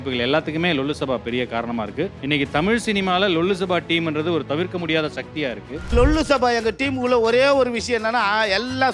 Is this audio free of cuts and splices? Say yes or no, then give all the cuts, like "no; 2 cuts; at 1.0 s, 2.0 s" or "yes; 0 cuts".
no; 2 cuts; at 2.2 s, 5.9 s